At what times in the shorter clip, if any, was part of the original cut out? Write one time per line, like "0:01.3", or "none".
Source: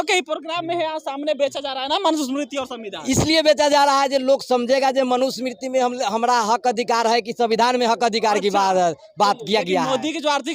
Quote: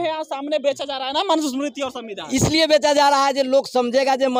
none